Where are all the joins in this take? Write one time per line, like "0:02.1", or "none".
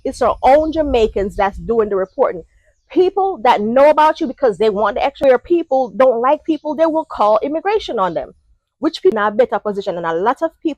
0:05.2
0:09.1